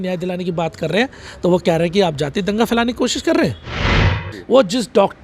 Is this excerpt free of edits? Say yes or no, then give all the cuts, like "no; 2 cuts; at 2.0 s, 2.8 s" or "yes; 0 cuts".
no; 1 cut; at 3.9 s